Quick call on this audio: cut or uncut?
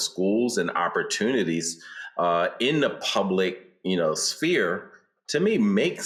uncut